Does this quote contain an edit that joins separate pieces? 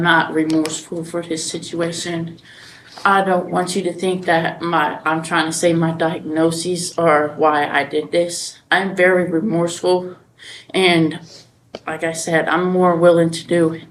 no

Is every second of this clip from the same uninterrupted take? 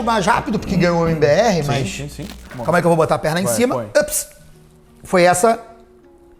no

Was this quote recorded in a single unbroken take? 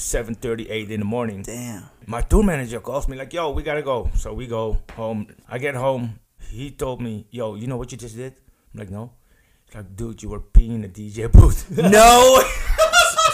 no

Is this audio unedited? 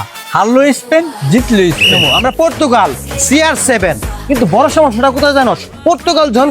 no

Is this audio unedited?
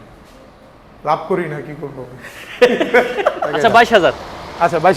no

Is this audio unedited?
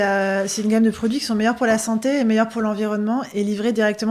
yes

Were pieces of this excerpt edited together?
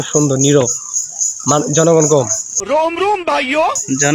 no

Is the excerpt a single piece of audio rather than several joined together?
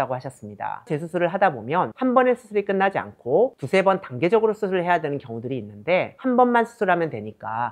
no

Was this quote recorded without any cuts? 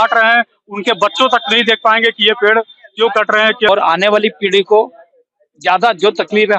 no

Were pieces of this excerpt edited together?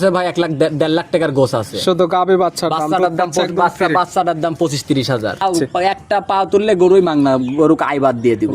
yes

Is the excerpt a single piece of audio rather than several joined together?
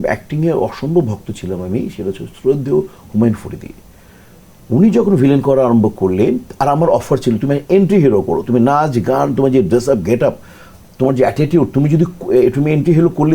yes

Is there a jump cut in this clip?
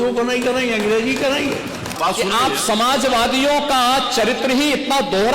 yes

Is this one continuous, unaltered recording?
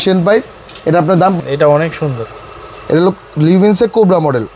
no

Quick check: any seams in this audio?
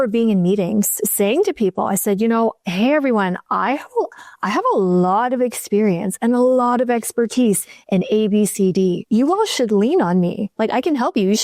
no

